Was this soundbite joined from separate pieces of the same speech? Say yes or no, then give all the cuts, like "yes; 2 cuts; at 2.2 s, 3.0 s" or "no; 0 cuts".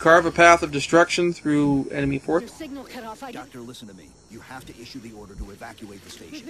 no; 0 cuts